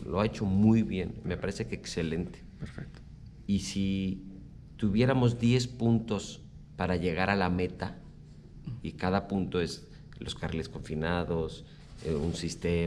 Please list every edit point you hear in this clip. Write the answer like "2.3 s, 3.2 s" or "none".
none